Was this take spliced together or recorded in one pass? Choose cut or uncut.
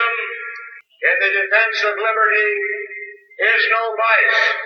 uncut